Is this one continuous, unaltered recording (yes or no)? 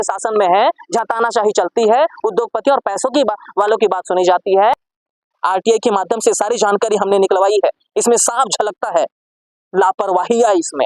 no